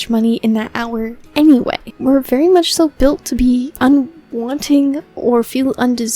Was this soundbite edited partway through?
yes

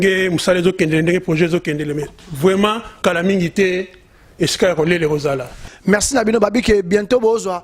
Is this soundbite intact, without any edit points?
no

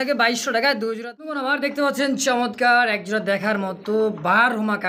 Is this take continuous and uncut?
no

